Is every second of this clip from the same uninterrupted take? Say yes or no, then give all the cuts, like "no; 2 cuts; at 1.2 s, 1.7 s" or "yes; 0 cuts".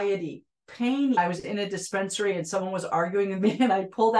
no; 1 cut; at 1.2 s